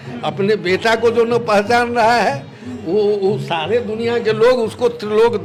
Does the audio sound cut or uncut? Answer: uncut